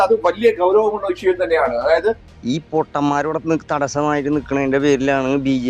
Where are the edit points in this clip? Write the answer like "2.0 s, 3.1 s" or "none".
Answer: 2.3 s